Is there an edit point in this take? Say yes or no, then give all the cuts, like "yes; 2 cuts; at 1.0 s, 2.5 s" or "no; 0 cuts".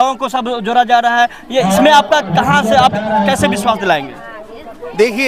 no; 0 cuts